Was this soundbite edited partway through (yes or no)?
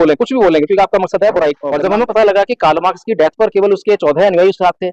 yes